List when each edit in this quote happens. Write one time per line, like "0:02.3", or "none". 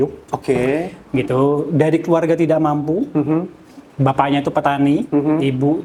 none

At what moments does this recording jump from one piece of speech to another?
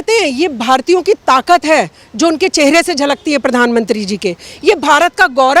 0:04.5

